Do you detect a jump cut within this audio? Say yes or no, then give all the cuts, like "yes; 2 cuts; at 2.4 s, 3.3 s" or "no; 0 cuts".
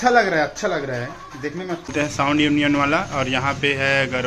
yes; 1 cut; at 1.9 s